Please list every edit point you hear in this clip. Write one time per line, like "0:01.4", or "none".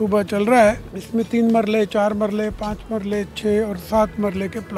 none